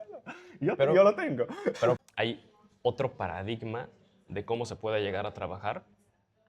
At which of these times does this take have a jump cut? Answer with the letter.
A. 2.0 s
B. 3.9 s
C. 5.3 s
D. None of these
A